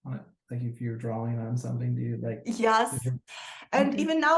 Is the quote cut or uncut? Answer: cut